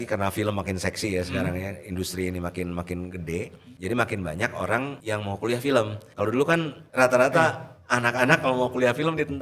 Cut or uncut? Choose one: cut